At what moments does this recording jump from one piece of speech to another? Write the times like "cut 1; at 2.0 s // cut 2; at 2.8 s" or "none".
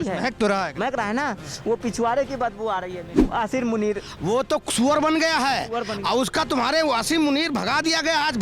cut 1; at 3.2 s